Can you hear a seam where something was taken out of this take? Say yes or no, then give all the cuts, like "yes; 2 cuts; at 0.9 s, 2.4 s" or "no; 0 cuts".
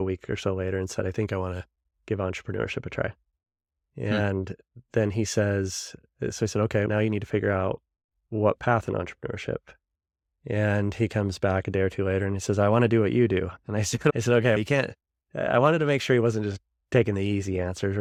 no; 0 cuts